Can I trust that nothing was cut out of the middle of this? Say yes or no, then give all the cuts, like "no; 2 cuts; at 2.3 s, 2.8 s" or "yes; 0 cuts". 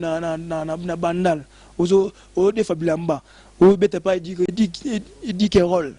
no; 1 cut; at 4.5 s